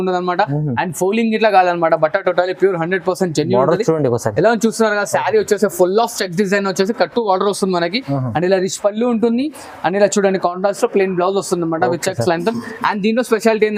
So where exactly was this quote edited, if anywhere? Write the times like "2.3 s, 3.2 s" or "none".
none